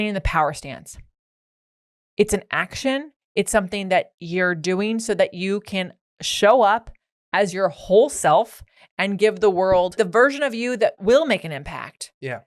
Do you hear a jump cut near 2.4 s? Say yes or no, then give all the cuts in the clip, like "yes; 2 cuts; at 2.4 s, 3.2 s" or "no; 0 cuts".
no; 2 cuts; at 9.9 s, 11.0 s